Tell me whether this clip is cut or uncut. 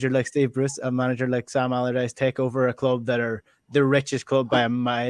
uncut